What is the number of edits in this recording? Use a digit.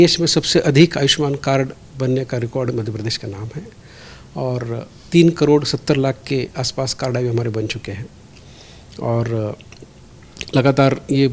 0